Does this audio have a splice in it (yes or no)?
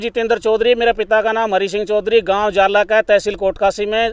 no